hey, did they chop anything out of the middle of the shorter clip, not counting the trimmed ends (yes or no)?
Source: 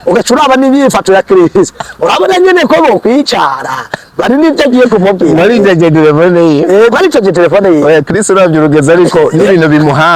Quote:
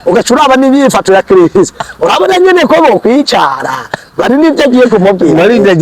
no